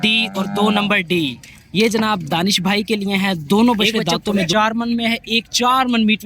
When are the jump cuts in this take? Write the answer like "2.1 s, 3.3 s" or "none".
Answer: 4.5 s

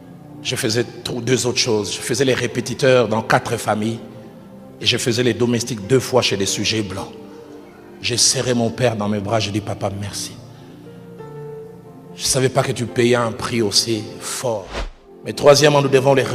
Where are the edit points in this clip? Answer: 14.9 s

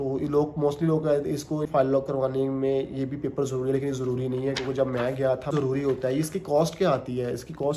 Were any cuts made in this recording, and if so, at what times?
1.7 s, 5.5 s

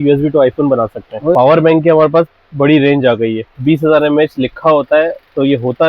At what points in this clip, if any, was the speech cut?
1.3 s, 3.5 s

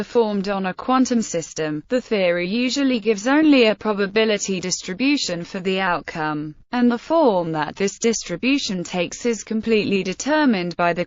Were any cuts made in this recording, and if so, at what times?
3.0 s

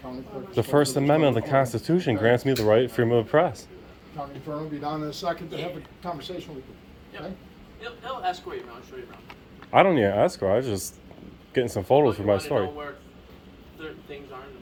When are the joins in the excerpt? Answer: none

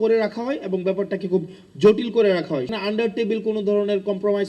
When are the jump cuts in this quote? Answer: 2.7 s

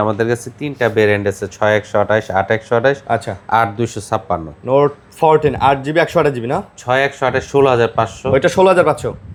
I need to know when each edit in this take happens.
none

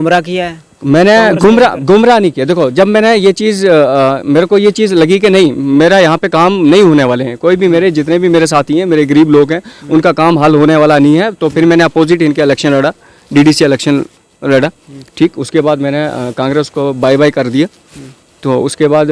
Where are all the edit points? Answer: none

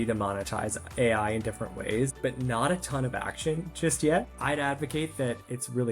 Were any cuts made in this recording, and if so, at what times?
2.1 s, 4.3 s

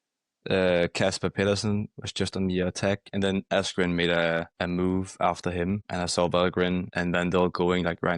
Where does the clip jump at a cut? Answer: 3.5 s, 4.5 s, 5.9 s, 6.9 s

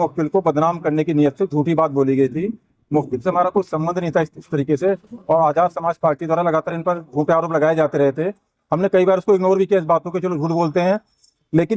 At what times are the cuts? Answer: none

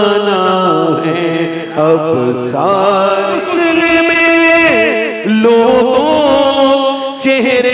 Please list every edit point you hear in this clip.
3.5 s

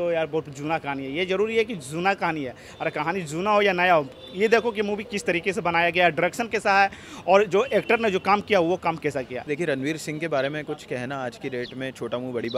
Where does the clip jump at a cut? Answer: 9.5 s

